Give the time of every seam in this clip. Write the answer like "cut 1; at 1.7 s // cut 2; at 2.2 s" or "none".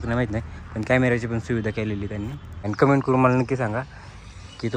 cut 1; at 2.7 s